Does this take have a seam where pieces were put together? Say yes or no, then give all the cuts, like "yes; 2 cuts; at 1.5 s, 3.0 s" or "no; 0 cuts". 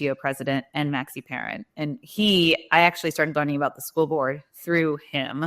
no; 0 cuts